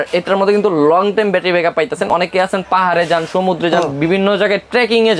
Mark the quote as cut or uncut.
uncut